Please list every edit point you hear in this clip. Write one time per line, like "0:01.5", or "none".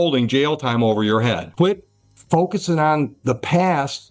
0:01.5